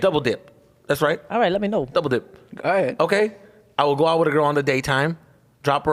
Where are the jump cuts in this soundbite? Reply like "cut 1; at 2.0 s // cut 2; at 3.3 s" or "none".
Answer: none